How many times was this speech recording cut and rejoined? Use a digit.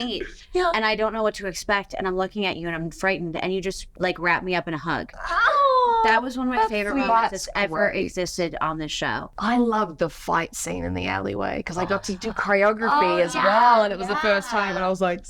3